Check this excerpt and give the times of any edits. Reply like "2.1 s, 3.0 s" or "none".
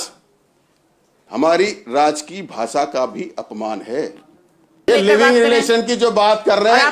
4.9 s